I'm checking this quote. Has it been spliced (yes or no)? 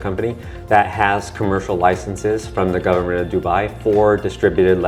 no